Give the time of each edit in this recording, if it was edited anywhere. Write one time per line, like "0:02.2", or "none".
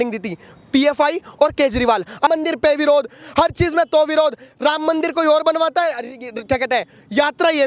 0:02.3